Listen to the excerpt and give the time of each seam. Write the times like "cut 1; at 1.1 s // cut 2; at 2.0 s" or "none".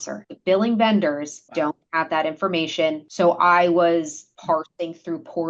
cut 1; at 1.4 s // cut 2; at 3.0 s // cut 3; at 4.2 s